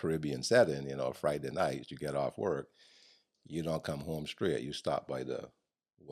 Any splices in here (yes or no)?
no